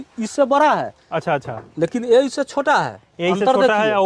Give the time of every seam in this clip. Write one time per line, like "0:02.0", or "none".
none